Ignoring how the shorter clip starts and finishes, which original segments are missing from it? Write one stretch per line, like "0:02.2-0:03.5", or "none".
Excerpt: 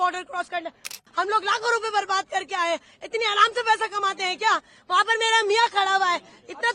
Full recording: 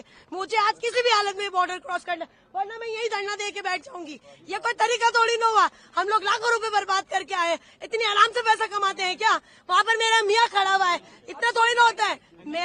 0:02.5-0:05.7